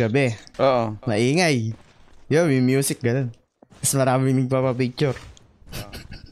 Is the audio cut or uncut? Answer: uncut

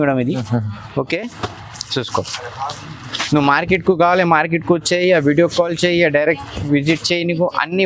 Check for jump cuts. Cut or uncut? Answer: uncut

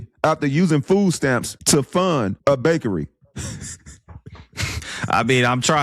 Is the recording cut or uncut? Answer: cut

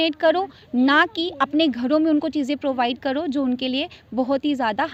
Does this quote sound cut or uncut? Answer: uncut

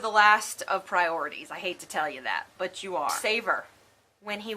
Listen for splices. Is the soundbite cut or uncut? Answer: cut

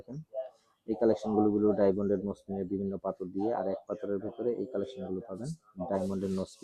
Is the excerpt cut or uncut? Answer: uncut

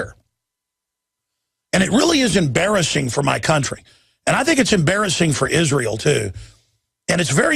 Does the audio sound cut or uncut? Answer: cut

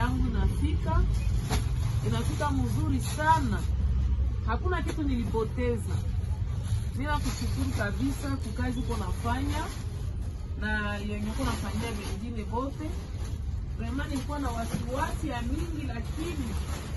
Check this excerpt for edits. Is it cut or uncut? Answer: uncut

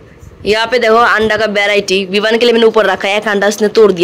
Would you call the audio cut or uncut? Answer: uncut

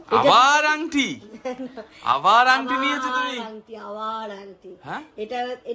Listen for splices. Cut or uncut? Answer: uncut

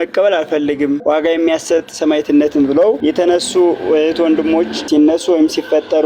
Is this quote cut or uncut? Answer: cut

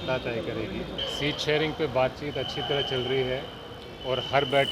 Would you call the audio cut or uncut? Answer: cut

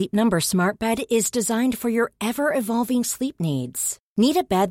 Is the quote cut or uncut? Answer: uncut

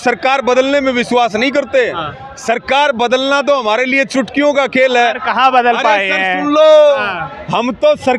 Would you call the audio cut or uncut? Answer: uncut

